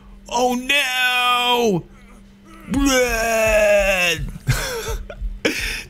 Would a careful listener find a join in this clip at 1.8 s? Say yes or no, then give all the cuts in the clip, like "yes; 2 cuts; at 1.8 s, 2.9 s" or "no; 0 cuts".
no; 0 cuts